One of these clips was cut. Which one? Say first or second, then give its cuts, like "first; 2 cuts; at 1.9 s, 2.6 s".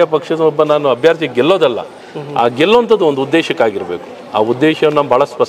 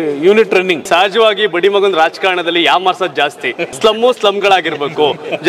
second; 2 cuts; at 0.8 s, 3.7 s